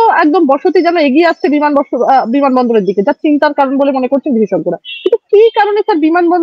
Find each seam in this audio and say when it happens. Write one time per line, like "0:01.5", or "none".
none